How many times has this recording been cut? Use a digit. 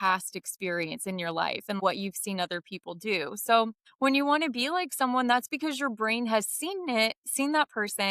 2